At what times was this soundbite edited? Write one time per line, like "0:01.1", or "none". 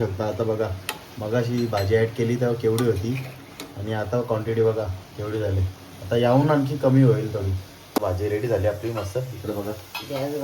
0:08.0